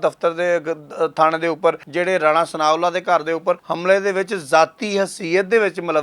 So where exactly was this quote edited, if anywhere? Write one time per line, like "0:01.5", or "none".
0:01.9
0:03.7